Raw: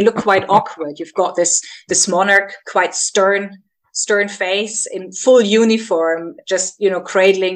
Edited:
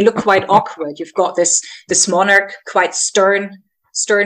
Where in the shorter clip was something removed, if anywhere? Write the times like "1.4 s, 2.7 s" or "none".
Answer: none